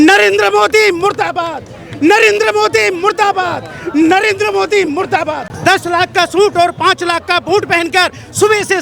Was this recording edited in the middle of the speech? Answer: yes; 1 cut; at 5.5 s

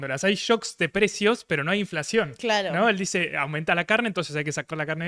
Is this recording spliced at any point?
no; 0 cuts

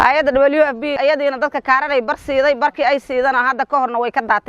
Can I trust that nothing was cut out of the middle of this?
no; 1 cut; at 1.0 s

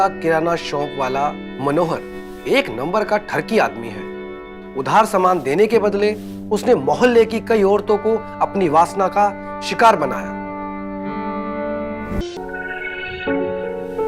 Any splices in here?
yes; 1 cut; at 12.2 s

